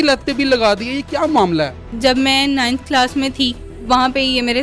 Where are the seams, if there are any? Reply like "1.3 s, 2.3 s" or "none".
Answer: 1.9 s, 3.8 s

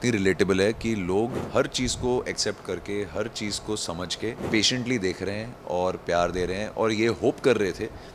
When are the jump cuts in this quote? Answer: 1.4 s, 4.4 s

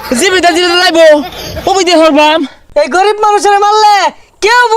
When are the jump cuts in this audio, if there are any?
2.6 s

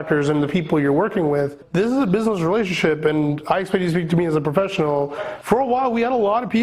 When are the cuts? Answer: 1.6 s, 5.3 s

